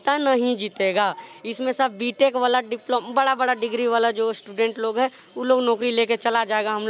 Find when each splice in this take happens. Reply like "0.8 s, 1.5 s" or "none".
none

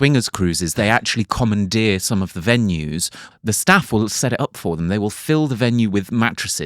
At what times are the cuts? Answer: 3.2 s

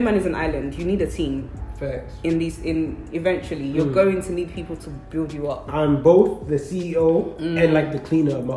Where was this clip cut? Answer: 5.7 s

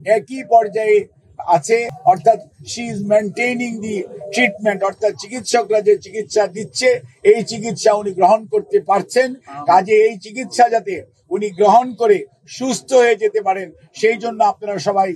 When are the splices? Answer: 1.9 s

